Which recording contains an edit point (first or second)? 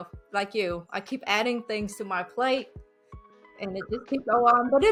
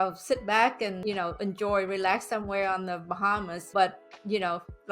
second